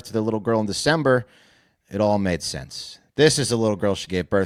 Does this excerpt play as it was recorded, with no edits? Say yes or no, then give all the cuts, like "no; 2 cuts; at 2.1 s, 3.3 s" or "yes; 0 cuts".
yes; 0 cuts